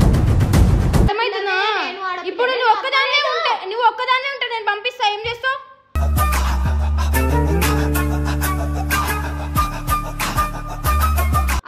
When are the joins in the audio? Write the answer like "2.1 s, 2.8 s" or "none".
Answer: 1.1 s